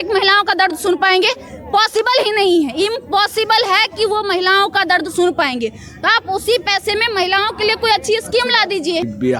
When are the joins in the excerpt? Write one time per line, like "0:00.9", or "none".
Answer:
none